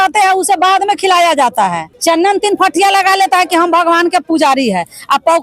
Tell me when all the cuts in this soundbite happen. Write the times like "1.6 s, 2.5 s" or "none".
1.9 s